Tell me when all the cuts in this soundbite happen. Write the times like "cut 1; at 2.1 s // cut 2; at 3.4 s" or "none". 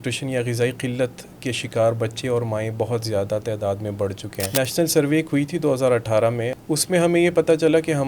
cut 1; at 4.5 s // cut 2; at 6.5 s